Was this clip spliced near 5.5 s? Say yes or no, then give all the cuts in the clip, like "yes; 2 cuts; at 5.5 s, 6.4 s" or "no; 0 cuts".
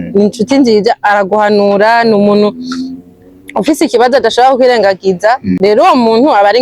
yes; 1 cut; at 5.5 s